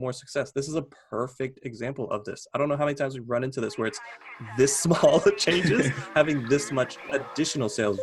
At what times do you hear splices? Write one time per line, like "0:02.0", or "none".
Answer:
0:07.1